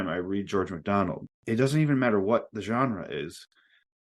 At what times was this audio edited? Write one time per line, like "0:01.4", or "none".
0:01.3